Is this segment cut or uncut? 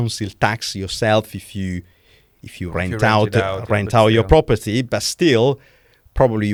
uncut